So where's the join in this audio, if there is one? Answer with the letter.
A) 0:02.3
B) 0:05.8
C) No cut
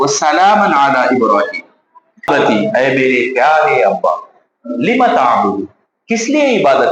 A